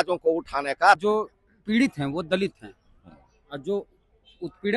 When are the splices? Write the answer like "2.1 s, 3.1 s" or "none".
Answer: 1.0 s